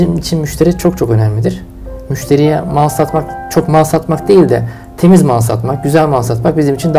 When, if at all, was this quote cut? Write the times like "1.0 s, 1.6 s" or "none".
none